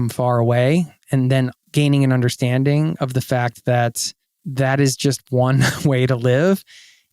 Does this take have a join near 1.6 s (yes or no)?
yes